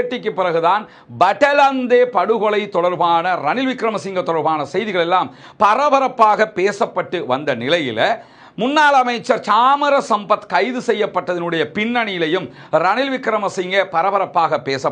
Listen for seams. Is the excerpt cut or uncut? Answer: uncut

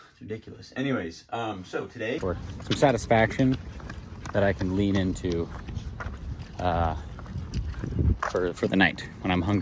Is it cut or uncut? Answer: cut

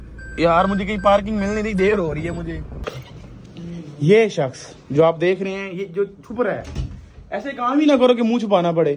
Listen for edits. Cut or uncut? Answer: cut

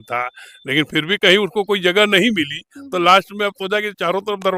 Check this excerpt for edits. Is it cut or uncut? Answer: uncut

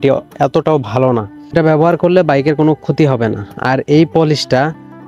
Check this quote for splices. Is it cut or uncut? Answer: cut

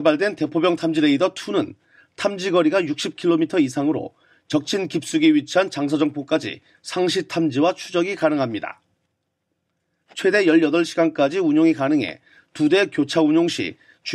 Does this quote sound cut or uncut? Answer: cut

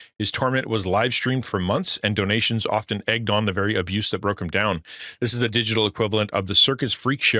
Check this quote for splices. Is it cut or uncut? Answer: uncut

